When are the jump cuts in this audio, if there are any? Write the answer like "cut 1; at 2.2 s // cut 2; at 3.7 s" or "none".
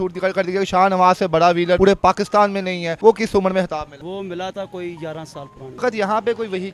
cut 1; at 1.8 s // cut 2; at 2.9 s // cut 3; at 3.9 s // cut 4; at 5.8 s